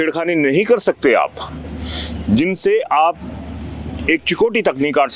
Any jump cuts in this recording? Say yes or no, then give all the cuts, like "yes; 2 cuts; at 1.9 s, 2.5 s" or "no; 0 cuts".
no; 0 cuts